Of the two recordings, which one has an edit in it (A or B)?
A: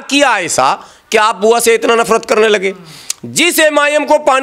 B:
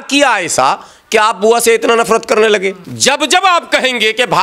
B